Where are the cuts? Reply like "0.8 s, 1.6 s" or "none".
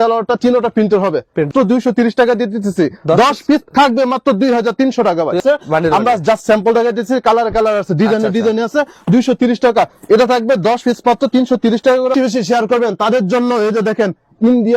1.5 s, 5.4 s, 12.1 s

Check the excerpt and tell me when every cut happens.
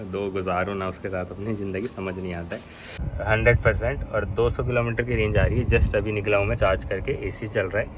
2.7 s

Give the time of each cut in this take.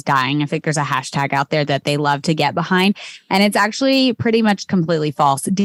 none

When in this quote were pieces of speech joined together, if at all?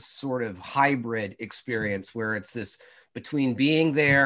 none

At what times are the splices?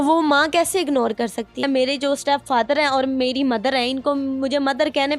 1.6 s

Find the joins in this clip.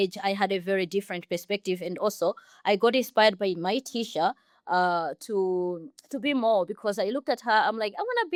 none

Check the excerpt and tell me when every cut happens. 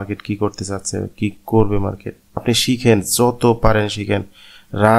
2.4 s

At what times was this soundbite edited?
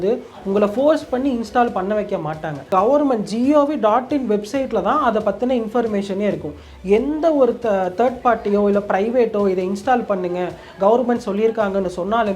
2.6 s

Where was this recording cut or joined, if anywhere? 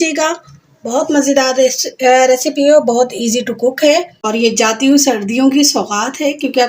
4.1 s

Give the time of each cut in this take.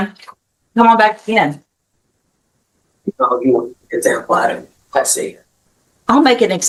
none

